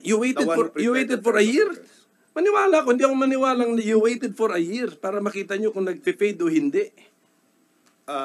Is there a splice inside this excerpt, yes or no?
no